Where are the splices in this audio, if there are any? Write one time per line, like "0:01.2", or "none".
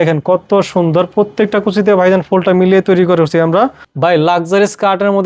0:03.8